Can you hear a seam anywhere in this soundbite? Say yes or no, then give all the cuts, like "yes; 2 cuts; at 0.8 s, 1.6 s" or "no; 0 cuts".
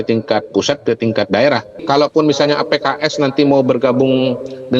yes; 1 cut; at 1.7 s